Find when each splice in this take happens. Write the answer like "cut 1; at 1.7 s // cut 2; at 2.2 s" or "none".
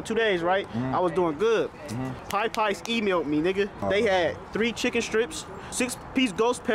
cut 1; at 2.2 s // cut 2; at 3.8 s